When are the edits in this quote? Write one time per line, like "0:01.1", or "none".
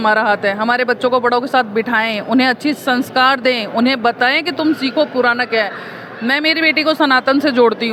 none